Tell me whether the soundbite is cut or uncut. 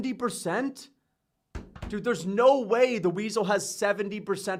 uncut